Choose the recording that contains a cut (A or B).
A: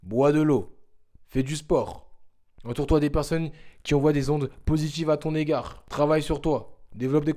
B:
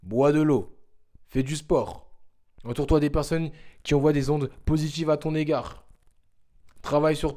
A